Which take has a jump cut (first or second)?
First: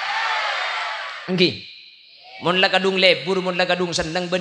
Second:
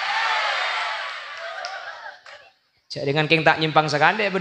first